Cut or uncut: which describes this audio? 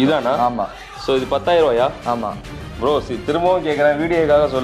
uncut